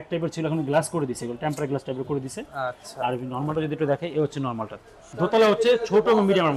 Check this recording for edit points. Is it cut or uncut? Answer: cut